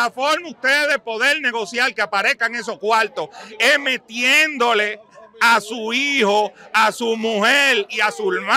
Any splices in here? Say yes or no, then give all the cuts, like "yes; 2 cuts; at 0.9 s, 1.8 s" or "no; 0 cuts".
no; 0 cuts